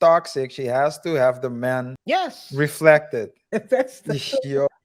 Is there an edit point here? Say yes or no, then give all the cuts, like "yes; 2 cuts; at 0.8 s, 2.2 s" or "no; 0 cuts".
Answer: yes; 2 cuts; at 1.9 s, 3.4 s